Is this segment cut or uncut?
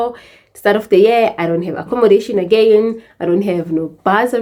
uncut